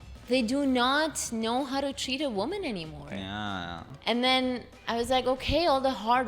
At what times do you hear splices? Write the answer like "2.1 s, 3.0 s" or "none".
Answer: 3.9 s